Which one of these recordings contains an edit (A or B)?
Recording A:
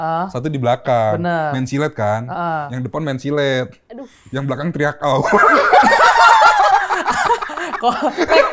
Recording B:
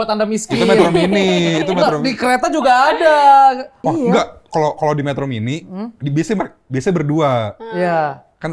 B